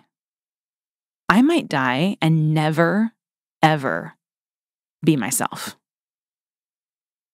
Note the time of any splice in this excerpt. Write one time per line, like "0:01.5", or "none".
none